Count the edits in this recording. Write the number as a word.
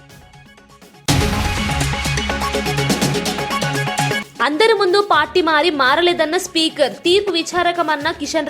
two